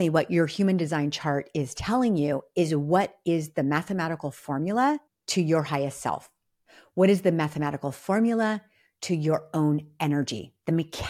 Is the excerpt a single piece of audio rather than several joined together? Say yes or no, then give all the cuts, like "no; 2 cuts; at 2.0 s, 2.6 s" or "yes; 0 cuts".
no; 1 cut; at 5.2 s